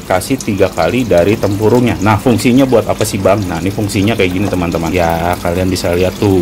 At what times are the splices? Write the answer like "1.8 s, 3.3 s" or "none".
4.9 s